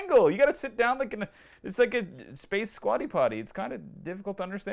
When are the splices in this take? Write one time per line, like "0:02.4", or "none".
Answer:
none